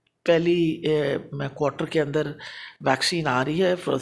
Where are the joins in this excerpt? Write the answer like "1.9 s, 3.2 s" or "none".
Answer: none